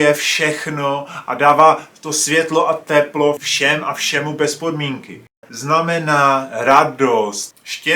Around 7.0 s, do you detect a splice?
no; 1 cut; at 5.5 s

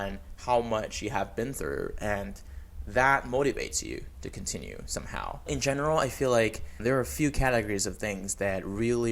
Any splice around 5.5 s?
yes; 2 cuts; at 5.5 s, 6.7 s

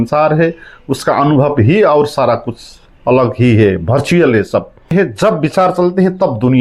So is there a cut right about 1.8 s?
no; 1 cut; at 4.9 s

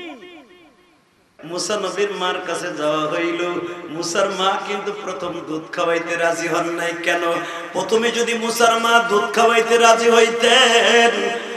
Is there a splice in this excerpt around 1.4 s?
yes; 1 cut; at 1.4 s

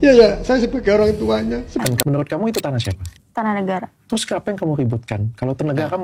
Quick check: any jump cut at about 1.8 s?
yes; 1 cut; at 1.8 s

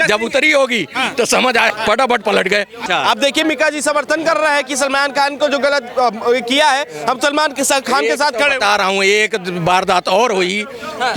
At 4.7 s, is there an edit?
no; 1 cut; at 2.8 s

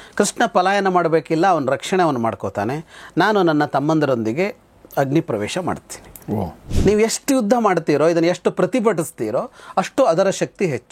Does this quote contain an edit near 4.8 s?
no; 1 cut; at 6.6 s

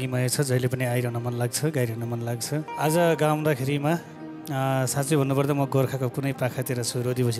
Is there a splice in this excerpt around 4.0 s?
no; 1 cut; at 2.7 s

